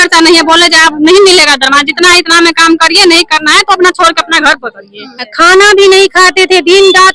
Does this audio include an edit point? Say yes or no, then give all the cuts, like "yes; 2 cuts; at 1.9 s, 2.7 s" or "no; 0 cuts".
yes; 1 cut; at 5.3 s